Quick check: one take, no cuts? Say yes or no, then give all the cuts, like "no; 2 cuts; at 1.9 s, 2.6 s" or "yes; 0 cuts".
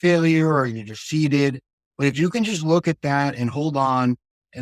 yes; 0 cuts